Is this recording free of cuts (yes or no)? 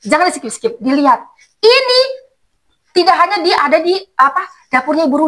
yes